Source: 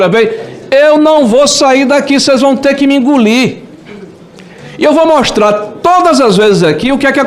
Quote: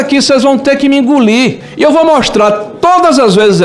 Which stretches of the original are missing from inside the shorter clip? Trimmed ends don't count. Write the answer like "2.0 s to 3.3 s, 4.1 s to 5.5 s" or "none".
3.6 s to 4.7 s